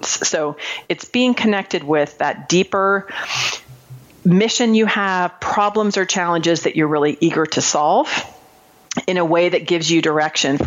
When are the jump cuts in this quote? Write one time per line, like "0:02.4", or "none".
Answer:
none